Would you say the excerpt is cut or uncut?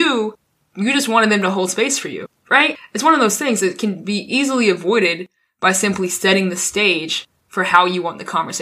cut